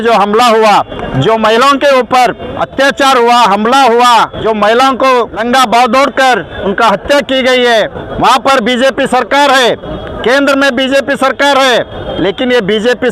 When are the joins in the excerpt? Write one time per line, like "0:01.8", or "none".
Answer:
0:01.0
0:02.5
0:04.4
0:05.4
0:06.5
0:08.0
0:10.1
0:12.1

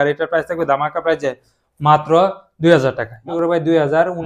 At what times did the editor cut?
0:03.3

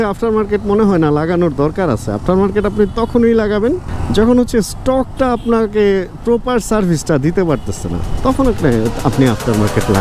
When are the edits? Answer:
none

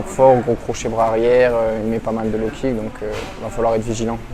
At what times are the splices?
none

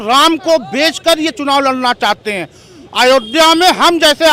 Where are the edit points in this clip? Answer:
none

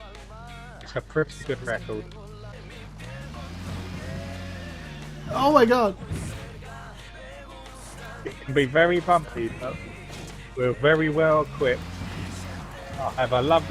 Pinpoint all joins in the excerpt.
0:02.5

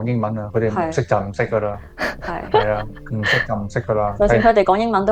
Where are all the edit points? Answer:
none

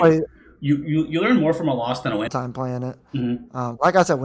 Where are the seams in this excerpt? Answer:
0:02.3

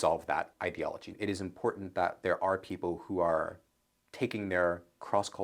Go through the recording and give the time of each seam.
0:01.1

